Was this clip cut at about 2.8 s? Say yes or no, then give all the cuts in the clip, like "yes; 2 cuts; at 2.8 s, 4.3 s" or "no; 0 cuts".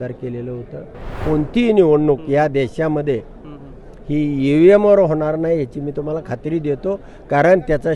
no; 1 cut; at 1.2 s